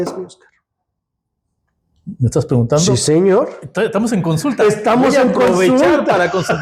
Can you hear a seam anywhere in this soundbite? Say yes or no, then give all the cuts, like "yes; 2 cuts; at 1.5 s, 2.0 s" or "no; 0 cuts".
no; 0 cuts